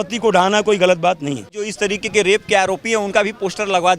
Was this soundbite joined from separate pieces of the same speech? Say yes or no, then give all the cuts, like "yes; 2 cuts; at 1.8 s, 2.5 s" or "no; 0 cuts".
yes; 1 cut; at 1.7 s